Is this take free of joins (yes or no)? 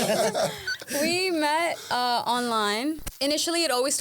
no